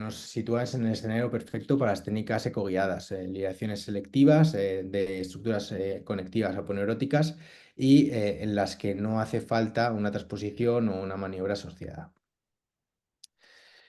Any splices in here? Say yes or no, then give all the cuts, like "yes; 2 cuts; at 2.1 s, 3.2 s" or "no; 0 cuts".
no; 0 cuts